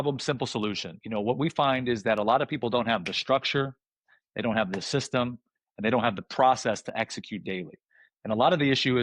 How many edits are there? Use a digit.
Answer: 1